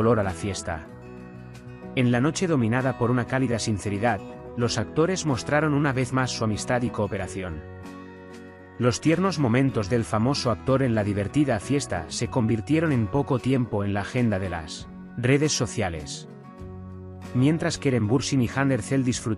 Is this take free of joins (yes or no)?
yes